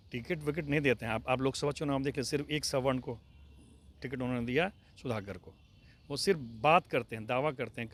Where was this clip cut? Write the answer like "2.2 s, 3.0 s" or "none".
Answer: none